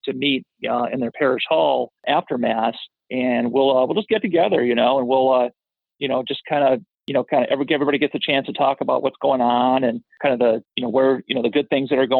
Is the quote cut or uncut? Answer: cut